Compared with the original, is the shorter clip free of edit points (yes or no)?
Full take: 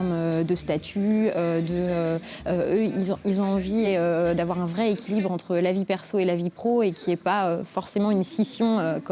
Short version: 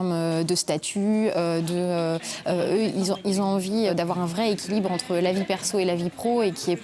no